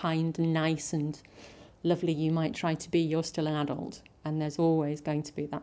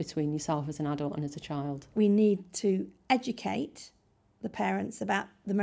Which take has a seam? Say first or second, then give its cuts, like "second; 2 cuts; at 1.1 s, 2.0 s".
second; 1 cut; at 1.9 s